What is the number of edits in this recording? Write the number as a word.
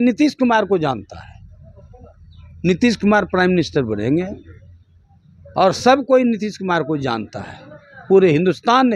zero